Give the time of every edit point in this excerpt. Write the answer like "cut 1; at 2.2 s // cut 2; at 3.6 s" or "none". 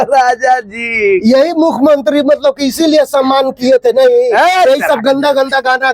none